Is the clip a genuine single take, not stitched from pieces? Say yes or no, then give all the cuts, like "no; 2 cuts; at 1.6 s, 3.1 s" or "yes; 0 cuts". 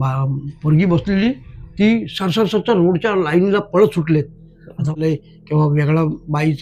no; 1 cut; at 4.9 s